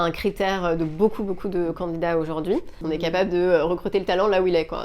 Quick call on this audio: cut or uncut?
cut